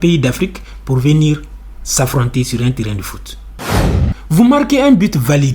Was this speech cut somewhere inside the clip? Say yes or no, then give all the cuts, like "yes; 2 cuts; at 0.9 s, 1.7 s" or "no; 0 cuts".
yes; 1 cut; at 3.7 s